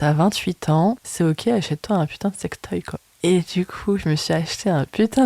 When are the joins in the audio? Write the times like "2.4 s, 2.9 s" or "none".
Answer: 1.1 s, 3.0 s